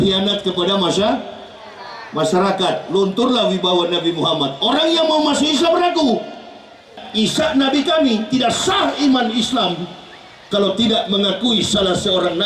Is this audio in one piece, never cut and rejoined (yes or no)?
no